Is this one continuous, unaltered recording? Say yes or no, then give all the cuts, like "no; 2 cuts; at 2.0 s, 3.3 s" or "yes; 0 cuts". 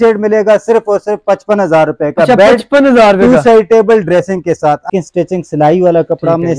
no; 1 cut; at 4.9 s